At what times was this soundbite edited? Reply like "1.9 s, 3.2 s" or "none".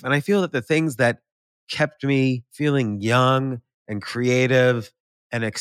2.5 s